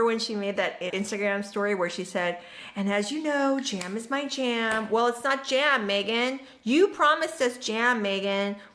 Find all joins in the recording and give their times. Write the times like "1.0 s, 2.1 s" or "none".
0.9 s